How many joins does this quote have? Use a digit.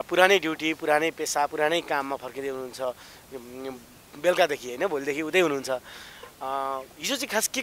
0